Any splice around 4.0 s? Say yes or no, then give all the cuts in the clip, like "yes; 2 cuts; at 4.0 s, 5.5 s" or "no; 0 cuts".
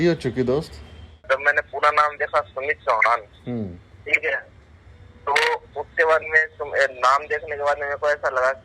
no; 1 cut; at 1.2 s